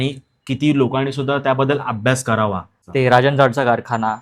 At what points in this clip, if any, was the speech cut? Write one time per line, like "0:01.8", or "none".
0:02.8